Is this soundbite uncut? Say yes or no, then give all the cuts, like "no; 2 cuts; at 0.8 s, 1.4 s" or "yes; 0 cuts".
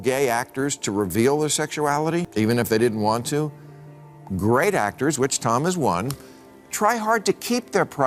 no; 1 cut; at 2.3 s